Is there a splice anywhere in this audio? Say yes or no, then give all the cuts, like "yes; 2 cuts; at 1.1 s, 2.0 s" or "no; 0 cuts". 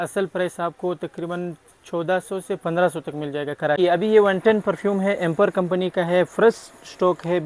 yes; 1 cut; at 3.8 s